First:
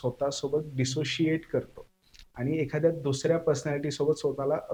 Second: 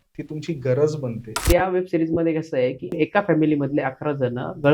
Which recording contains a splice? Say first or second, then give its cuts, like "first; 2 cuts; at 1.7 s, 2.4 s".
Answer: second; 2 cuts; at 1.4 s, 3.0 s